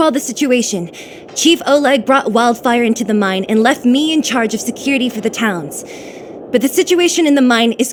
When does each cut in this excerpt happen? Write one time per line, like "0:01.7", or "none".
none